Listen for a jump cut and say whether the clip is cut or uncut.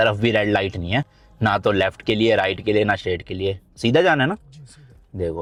uncut